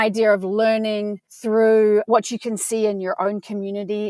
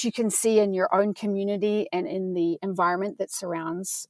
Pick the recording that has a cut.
first; 1 cut; at 1.3 s

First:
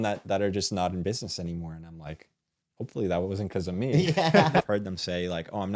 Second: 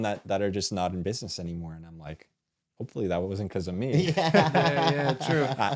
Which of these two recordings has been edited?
first; 1 cut; at 4.6 s

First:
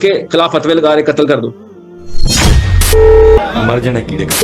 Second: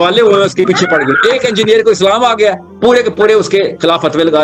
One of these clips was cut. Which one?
first; 1 cut; at 3.4 s

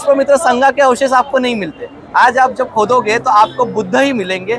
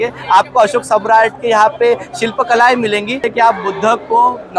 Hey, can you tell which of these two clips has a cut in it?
second; 1 cut; at 3.2 s

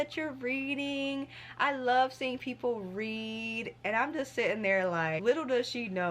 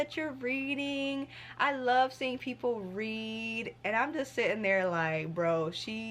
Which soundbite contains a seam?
first; 1 cut; at 5.2 s

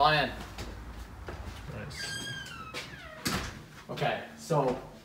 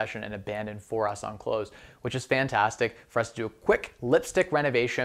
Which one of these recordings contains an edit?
first; 1 cut; at 1.7 s

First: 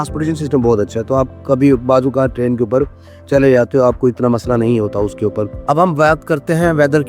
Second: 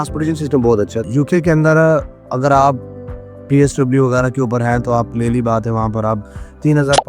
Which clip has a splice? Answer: second; 1 cut; at 1.0 s

